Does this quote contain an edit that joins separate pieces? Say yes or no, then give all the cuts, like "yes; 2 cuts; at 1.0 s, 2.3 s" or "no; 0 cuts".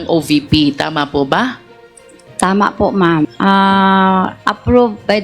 yes; 1 cut; at 3.3 s